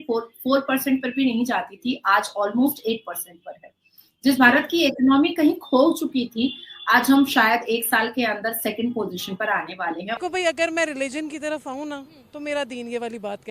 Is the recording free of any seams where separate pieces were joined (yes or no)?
no